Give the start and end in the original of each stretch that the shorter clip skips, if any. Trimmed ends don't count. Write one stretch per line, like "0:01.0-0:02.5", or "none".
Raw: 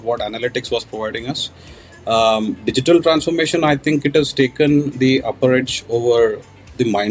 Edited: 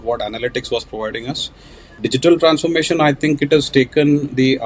0:02.0-0:02.6